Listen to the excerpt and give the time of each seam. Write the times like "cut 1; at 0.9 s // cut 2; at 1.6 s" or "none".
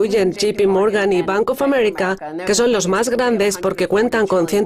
none